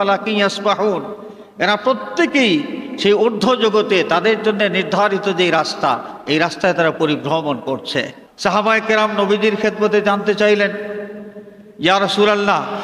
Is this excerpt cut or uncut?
cut